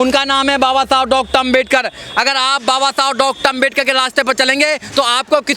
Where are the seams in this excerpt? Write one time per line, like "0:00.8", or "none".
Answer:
none